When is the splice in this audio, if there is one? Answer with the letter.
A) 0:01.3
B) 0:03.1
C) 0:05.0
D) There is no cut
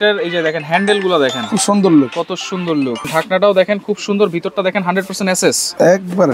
B